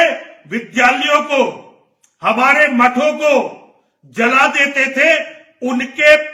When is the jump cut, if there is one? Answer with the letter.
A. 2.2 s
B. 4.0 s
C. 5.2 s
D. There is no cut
D